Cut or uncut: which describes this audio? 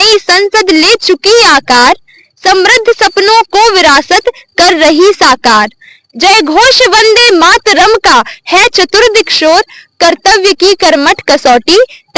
uncut